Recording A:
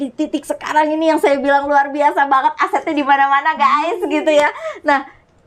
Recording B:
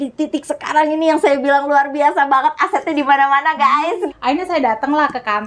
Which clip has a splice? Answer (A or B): B